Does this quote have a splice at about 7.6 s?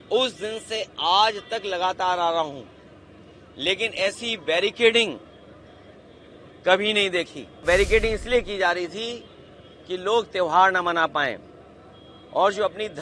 yes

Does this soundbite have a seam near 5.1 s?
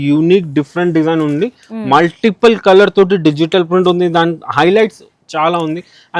no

